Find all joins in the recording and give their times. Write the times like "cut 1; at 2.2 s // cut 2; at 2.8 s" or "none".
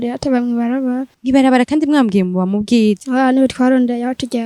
cut 1; at 1.1 s // cut 2; at 3.0 s